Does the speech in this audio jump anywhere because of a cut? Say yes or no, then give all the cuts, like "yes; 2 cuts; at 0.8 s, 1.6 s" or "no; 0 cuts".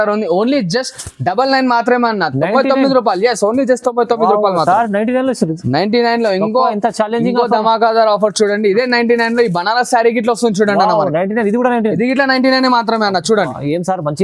no; 0 cuts